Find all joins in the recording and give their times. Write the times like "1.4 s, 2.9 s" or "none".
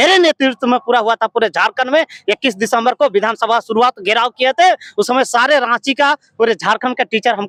none

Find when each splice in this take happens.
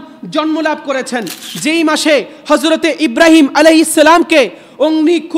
none

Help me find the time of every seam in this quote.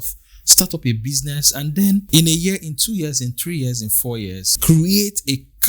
2.1 s, 4.5 s

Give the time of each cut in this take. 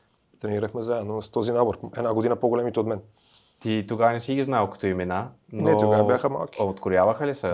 none

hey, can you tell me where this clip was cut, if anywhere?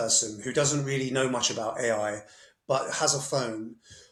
none

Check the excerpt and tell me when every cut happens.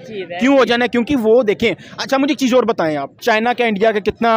3.1 s

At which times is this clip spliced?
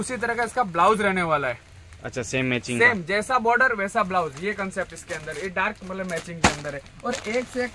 none

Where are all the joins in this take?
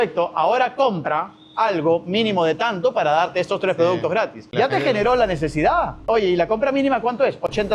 4.4 s, 6.0 s

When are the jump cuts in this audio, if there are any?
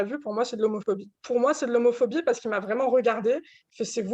1.1 s

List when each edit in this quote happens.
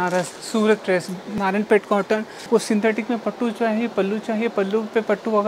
1.3 s, 2.5 s

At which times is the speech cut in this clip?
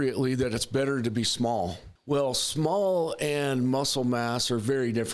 1.9 s

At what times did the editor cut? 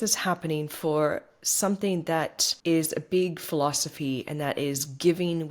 2.4 s

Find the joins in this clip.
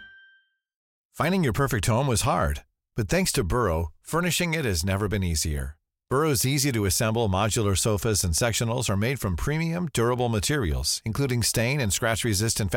1.0 s

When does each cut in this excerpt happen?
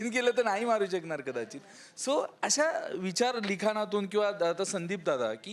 none

